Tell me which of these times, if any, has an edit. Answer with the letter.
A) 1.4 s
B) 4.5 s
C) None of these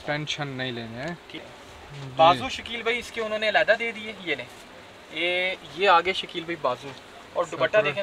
A